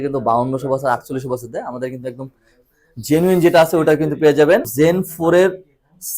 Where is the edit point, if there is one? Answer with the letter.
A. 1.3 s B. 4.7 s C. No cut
B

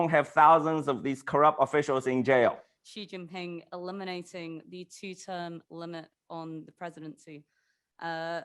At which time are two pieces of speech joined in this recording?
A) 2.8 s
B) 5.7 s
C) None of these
A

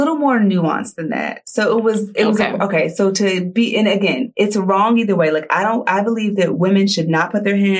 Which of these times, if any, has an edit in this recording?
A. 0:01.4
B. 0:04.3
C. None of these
C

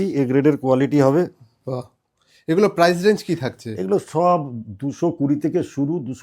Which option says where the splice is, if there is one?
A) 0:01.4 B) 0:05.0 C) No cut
C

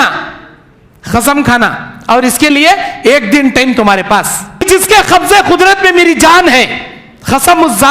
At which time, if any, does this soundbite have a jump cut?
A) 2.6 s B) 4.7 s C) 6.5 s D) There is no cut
B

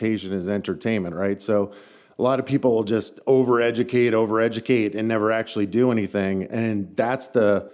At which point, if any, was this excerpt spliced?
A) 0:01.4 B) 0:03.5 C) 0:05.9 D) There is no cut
D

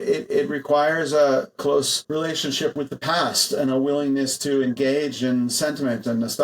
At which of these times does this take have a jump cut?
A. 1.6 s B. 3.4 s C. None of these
A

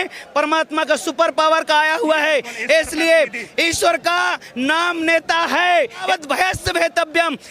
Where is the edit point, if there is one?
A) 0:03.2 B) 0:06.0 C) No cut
B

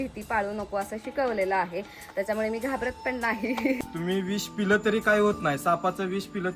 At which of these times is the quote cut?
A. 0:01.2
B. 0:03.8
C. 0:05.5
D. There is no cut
B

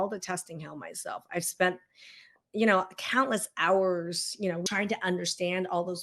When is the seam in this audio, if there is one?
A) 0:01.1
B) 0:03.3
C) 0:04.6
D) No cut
C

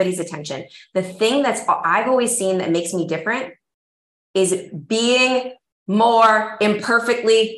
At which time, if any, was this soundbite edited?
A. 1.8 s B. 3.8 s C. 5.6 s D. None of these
D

